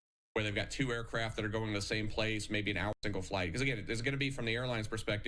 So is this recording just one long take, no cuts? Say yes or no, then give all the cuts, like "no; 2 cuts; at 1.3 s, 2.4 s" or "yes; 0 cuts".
no; 1 cut; at 3.0 s